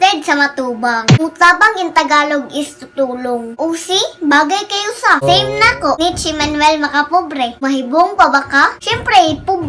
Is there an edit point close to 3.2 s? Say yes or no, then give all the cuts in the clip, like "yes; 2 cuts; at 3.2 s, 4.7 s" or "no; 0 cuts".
no; 4 cuts; at 1.2 s, 5.2 s, 6.0 s, 7.6 s